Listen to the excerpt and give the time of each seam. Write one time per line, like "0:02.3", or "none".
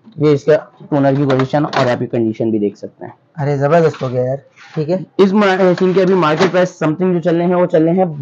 none